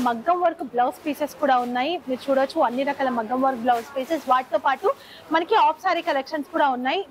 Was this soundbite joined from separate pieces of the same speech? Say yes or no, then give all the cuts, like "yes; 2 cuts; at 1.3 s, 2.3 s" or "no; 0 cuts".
no; 0 cuts